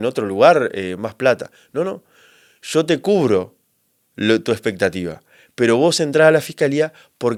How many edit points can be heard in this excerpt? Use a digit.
0